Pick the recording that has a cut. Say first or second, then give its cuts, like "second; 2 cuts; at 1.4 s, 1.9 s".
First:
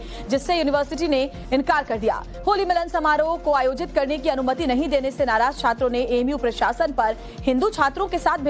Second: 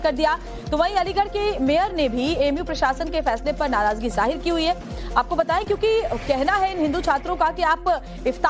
first; 1 cut; at 6.3 s